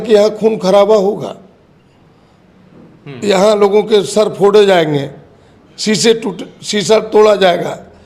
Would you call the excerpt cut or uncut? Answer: uncut